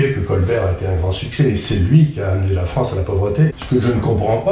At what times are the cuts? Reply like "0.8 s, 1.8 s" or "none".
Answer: 3.5 s